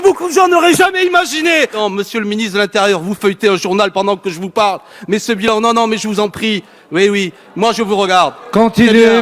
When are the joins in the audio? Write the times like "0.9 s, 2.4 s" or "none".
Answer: 1.8 s